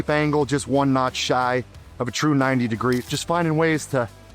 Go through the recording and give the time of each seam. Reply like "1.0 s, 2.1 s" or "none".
3.0 s